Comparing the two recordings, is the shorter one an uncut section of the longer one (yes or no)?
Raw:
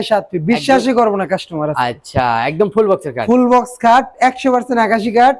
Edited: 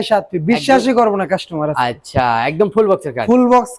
yes